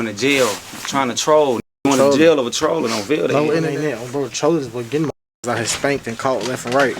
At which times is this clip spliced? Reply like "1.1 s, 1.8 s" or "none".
3.7 s